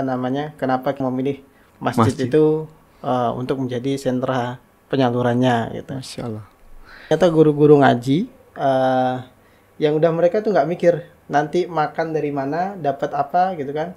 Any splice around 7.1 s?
yes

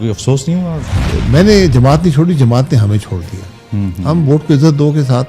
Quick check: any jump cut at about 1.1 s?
yes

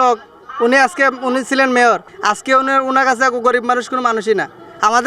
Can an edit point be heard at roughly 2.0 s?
no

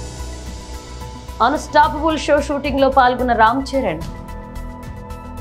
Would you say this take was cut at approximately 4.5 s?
no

